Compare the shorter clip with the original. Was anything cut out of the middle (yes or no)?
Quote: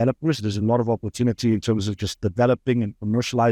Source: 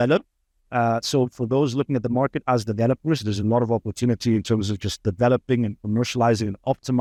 no